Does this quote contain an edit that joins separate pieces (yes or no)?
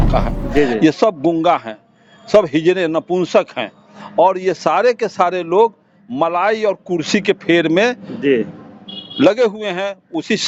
no